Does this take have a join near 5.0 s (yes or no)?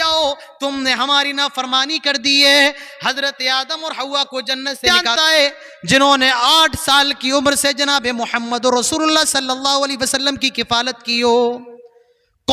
yes